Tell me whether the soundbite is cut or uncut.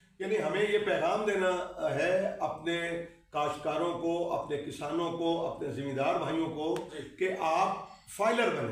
uncut